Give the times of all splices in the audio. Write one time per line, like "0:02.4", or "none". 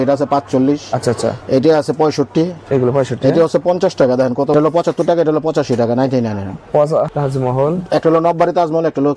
0:04.5
0:07.1